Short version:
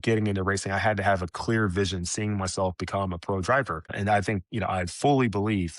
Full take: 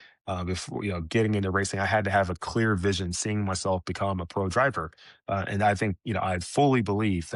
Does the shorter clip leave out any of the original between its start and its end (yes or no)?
yes